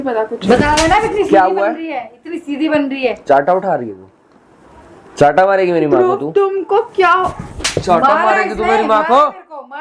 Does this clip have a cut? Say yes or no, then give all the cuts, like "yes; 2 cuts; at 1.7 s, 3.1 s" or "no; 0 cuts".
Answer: no; 0 cuts